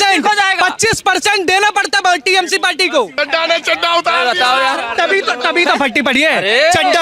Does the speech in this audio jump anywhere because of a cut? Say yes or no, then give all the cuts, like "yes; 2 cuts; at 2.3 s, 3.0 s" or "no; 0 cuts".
yes; 1 cut; at 3.1 s